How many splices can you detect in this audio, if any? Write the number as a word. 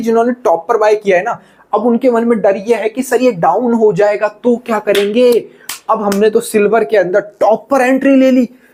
zero